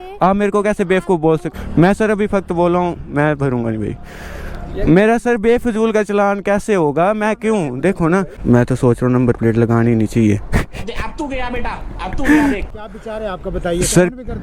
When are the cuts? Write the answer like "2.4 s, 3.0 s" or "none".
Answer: 1.5 s, 8.3 s, 12.8 s